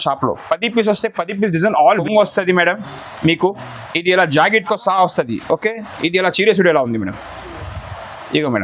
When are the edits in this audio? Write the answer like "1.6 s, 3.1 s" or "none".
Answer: 1.9 s